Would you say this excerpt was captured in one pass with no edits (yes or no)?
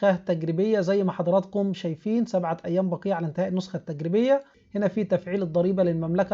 no